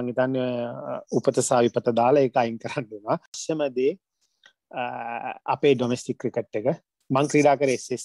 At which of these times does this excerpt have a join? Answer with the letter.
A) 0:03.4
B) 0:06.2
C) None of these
A